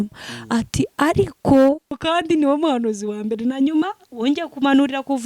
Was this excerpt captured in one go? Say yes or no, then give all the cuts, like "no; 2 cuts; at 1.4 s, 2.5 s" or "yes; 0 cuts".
no; 1 cut; at 1.9 s